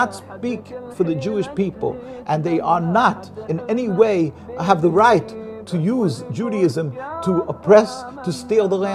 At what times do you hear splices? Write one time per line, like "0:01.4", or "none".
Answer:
none